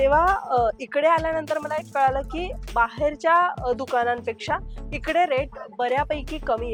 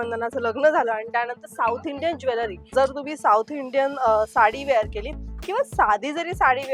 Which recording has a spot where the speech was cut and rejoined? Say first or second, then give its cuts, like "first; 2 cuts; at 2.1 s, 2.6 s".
second; 1 cut; at 2.7 s